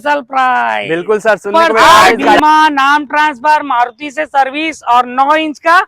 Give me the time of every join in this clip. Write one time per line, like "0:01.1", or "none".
0:02.4